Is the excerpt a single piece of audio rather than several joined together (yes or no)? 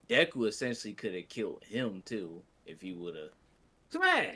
yes